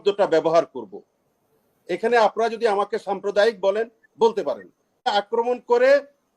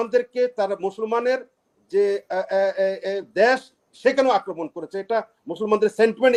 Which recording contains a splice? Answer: first; 1 cut; at 5.1 s

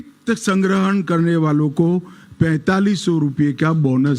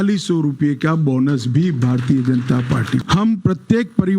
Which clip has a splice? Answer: second; 1 cut; at 3.0 s

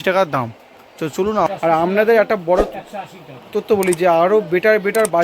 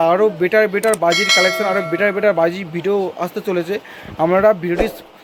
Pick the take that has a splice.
first; 1 cut; at 1.5 s

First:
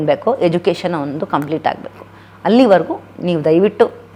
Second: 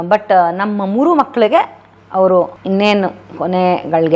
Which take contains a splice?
second; 1 cut; at 2.0 s

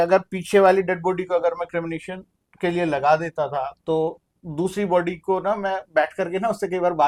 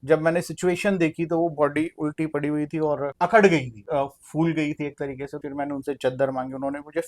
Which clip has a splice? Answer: second; 3 cuts; at 3.1 s, 3.8 s, 5.4 s

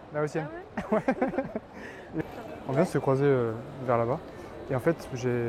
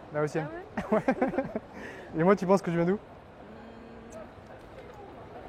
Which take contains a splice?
first; 1 cut; at 2.2 s

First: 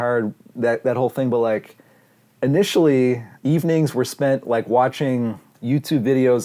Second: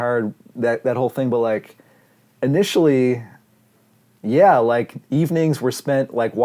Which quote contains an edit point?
first; 2 cuts; at 3.3 s, 5.5 s

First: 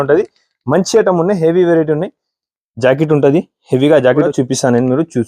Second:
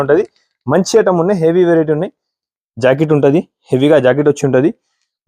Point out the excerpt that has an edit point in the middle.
first; 1 cut; at 4.3 s

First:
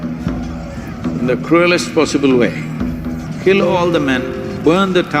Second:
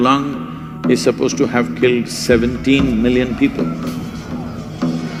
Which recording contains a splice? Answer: first; 1 cut; at 3.2 s

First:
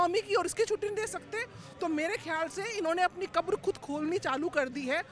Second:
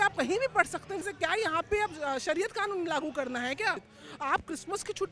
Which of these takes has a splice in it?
second; 2 cuts; at 1.0 s, 3.9 s

